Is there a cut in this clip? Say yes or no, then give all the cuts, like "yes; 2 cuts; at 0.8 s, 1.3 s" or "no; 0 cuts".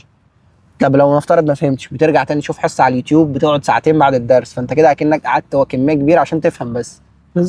no; 0 cuts